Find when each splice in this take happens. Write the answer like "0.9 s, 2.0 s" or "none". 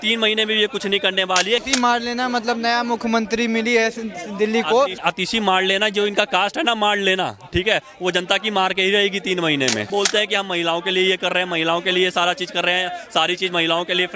1.6 s, 5.0 s, 9.9 s